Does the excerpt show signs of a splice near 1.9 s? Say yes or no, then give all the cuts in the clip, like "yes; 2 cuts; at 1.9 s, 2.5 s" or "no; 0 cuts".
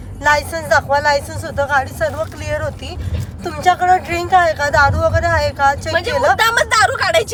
no; 0 cuts